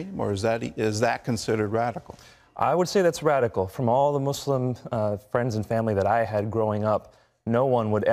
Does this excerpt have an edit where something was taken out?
yes; 1 cut; at 1.1 s

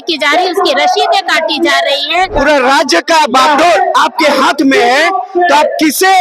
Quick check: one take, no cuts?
no; 1 cut; at 2.3 s

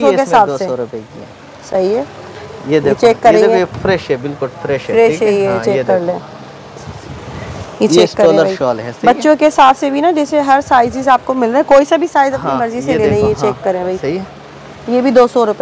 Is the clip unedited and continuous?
yes; 0 cuts

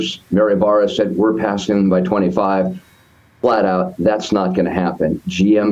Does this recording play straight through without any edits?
yes; 0 cuts

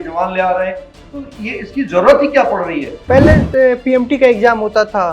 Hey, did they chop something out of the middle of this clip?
yes; 1 cut; at 2.9 s

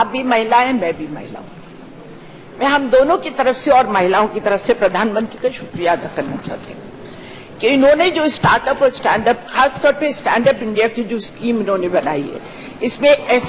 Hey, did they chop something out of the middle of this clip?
no; 0 cuts

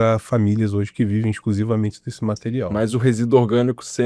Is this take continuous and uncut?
no; 1 cut; at 2.7 s

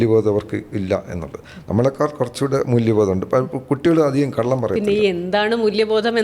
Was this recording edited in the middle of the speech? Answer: no; 0 cuts

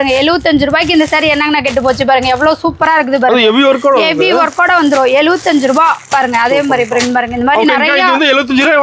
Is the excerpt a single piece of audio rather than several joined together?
yes; 0 cuts

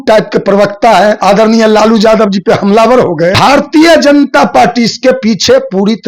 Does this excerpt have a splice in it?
yes; 2 cuts; at 1.2 s, 3.4 s

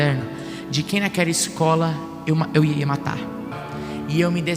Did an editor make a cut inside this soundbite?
yes; 1 cut; at 3.6 s

